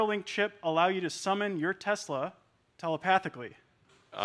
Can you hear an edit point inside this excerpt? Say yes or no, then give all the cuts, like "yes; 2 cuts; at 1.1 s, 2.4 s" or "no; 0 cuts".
no; 0 cuts